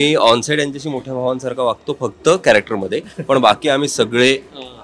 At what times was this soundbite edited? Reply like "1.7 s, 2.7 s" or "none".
none